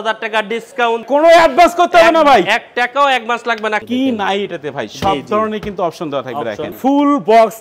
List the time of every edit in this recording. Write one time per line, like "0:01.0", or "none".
0:01.0
0:03.8
0:06.8